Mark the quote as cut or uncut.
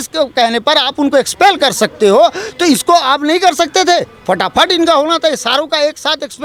uncut